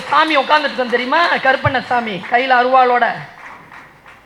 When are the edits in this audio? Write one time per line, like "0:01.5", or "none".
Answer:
none